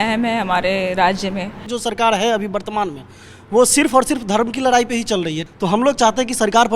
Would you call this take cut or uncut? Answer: cut